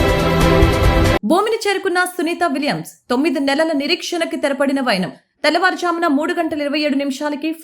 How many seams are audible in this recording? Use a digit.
1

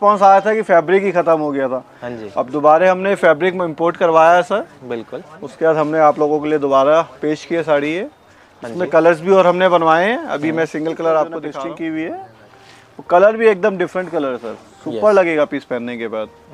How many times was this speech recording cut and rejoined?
1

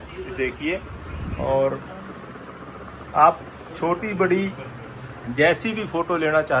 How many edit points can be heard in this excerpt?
0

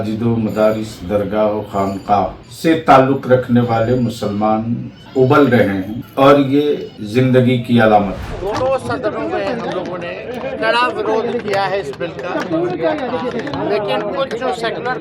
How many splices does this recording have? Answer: 5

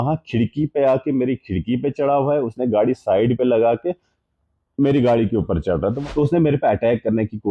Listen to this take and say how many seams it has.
1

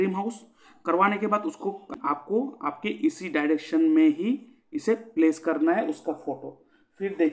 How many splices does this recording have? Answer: 1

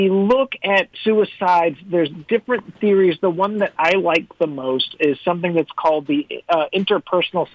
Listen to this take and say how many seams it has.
1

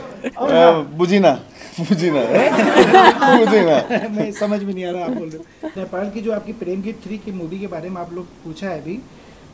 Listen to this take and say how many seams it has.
1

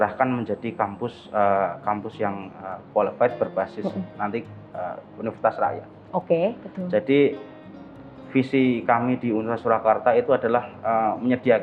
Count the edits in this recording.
0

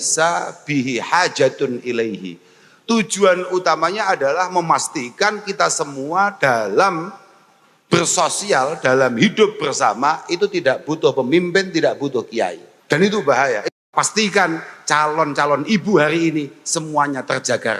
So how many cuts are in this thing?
2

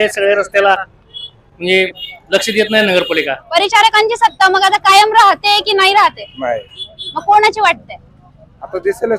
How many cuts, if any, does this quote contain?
1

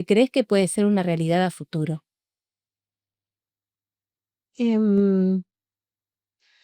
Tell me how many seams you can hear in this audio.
0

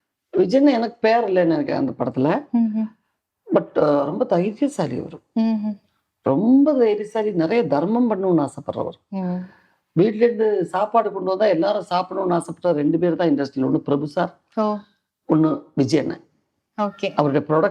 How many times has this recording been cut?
0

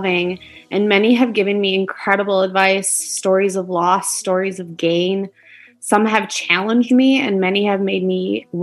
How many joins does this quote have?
0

